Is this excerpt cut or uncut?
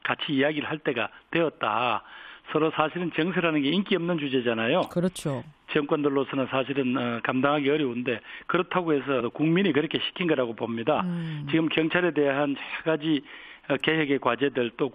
uncut